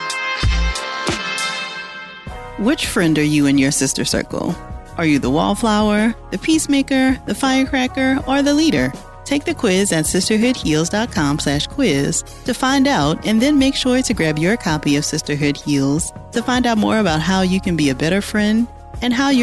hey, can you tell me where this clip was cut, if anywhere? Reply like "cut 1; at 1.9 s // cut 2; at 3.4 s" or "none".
cut 1; at 1.7 s